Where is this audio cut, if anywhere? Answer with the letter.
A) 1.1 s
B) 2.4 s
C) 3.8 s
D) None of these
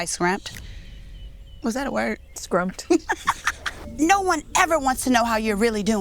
C